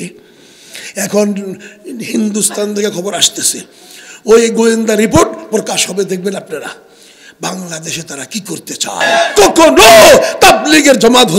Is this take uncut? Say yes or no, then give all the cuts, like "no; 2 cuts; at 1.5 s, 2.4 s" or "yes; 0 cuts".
no; 1 cut; at 9.0 s